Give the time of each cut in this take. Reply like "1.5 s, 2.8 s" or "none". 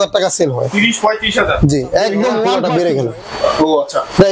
2.4 s